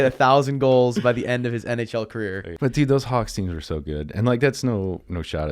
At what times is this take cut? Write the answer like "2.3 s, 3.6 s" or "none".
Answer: 2.5 s